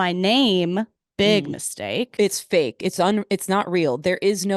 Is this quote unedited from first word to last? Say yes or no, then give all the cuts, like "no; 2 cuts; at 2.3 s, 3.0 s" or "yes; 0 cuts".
no; 1 cut; at 2.1 s